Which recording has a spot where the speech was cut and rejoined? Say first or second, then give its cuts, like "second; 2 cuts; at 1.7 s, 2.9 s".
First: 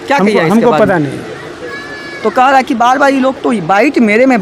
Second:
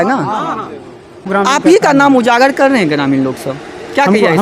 second; 1 cut; at 1.3 s